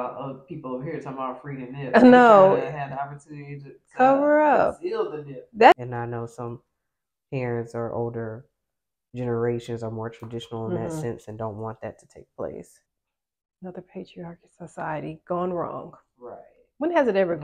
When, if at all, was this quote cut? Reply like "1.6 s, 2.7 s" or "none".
5.7 s, 12.8 s